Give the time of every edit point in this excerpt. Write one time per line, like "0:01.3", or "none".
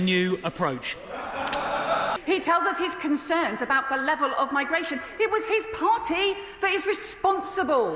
0:02.2

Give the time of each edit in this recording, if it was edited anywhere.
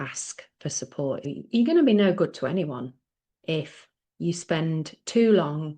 0:01.2

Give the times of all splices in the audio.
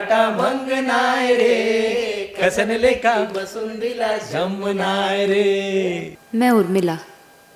0:06.1

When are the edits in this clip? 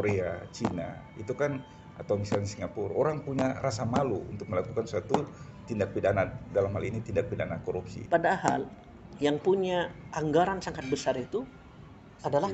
0:07.9

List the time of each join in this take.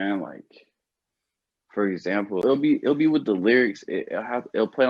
0:02.4

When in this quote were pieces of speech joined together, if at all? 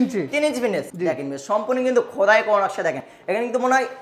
none

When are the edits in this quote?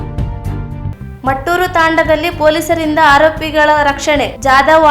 0:00.9

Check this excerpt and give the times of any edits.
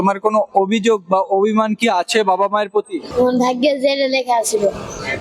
0:03.1

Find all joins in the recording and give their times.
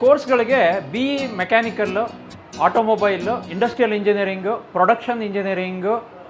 0:03.5

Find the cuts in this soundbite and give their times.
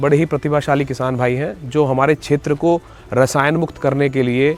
none

